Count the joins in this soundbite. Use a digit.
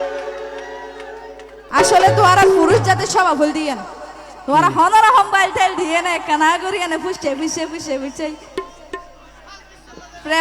1